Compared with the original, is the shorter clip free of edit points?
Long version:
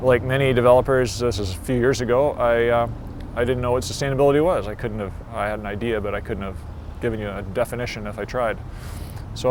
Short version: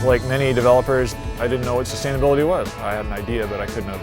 no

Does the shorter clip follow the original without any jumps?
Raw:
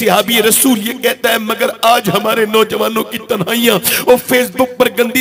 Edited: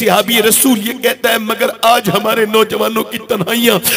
yes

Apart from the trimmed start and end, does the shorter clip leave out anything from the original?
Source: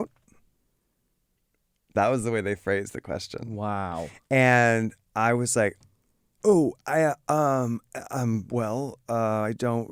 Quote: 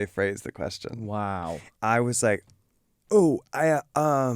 yes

